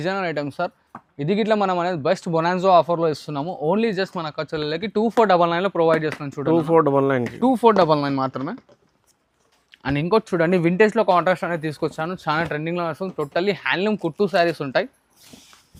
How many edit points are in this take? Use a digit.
0